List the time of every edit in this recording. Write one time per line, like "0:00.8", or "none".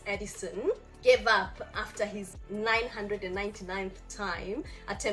0:00.9
0:02.3